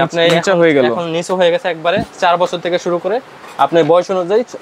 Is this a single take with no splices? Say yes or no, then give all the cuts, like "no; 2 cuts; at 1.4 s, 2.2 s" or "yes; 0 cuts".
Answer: yes; 0 cuts